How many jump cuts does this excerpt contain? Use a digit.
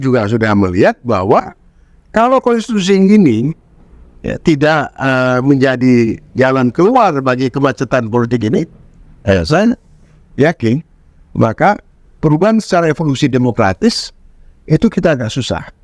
0